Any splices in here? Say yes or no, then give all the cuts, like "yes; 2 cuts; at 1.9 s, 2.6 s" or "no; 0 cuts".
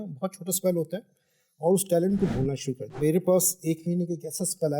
yes; 1 cut; at 3.0 s